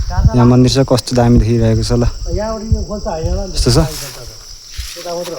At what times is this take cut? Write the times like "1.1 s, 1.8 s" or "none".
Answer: none